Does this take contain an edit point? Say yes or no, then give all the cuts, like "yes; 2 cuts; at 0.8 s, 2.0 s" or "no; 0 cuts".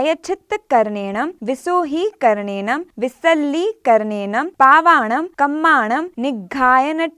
yes; 5 cuts; at 1.4 s, 2.9 s, 4.5 s, 5.3 s, 6.1 s